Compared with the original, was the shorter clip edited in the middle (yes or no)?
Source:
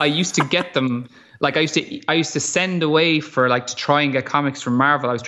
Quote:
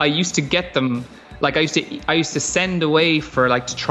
no